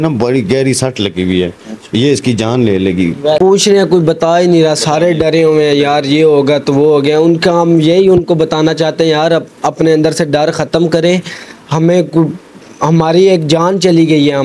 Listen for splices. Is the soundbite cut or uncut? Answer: cut